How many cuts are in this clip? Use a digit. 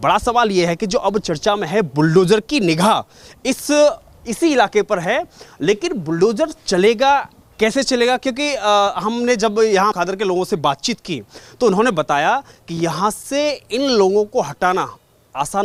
0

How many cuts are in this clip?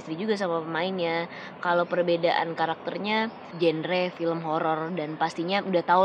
1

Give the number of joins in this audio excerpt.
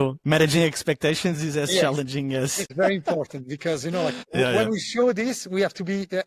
2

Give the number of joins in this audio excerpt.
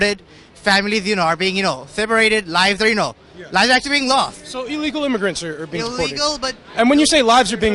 0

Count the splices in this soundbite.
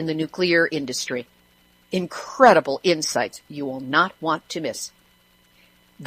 1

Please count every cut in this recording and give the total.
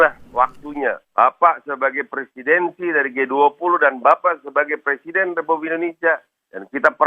1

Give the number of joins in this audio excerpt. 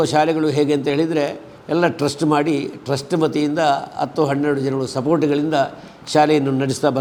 0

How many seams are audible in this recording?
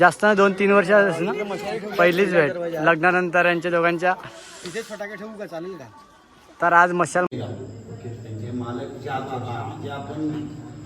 1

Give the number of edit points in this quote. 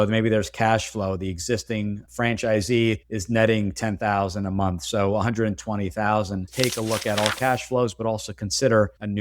1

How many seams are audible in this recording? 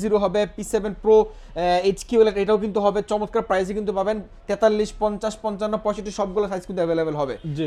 0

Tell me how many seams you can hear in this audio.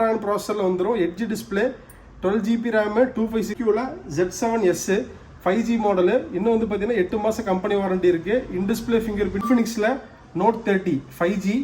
2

